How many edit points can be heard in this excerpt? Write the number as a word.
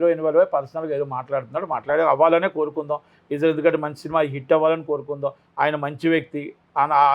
zero